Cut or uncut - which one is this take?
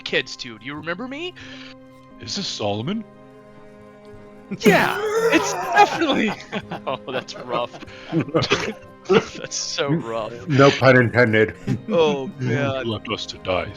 cut